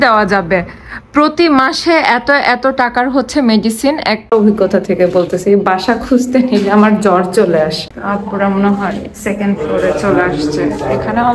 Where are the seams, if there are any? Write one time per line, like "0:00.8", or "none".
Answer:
0:04.3
0:07.9